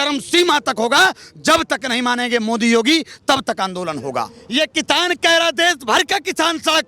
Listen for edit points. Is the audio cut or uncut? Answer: cut